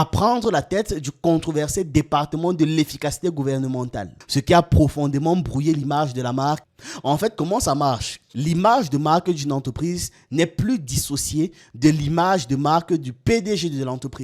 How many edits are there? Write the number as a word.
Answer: one